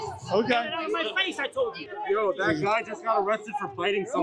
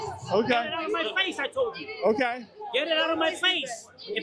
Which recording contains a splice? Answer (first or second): first